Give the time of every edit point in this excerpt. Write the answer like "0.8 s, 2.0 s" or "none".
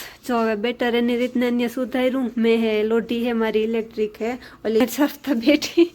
4.8 s

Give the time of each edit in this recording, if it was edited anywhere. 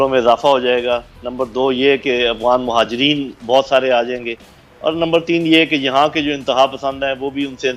none

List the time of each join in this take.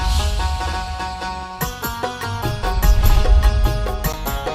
1.6 s

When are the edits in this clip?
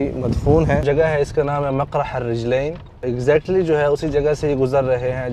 0.8 s, 3.0 s

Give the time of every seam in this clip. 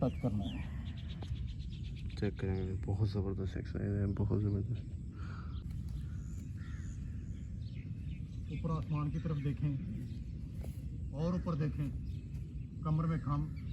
5.6 s

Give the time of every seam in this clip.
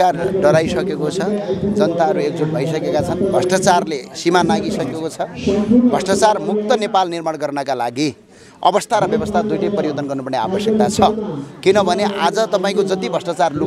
none

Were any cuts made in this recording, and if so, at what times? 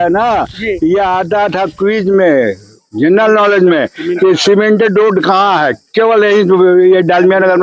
none

